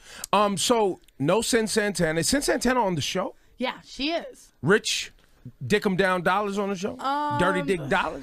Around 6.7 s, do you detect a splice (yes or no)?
no